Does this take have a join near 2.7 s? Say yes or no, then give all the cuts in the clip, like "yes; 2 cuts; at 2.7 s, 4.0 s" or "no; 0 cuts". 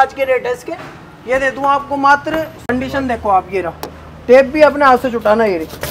yes; 1 cut; at 2.7 s